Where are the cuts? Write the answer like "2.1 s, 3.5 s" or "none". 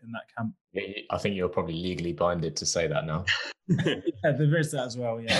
none